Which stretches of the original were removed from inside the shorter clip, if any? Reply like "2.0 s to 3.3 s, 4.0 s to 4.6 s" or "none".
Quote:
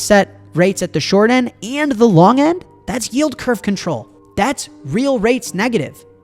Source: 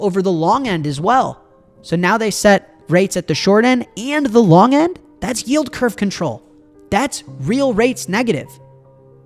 6.5 s to 6.7 s